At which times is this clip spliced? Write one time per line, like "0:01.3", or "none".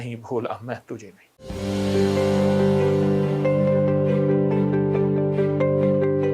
0:01.2